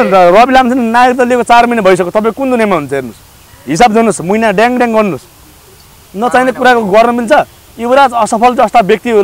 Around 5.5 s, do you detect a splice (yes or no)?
no